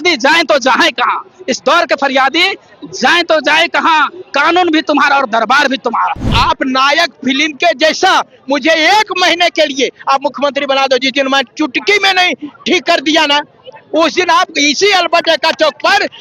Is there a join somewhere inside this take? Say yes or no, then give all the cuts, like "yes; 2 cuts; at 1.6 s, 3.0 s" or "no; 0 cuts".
yes; 1 cut; at 6.3 s